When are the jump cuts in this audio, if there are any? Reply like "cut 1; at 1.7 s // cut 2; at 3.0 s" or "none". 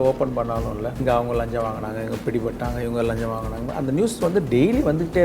cut 1; at 1.0 s